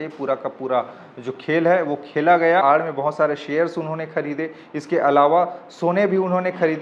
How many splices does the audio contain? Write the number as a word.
one